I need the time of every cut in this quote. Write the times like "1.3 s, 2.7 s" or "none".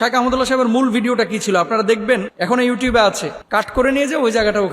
2.3 s, 3.3 s